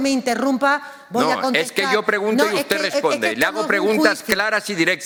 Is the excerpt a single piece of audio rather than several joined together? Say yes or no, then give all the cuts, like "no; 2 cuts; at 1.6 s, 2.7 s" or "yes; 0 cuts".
yes; 0 cuts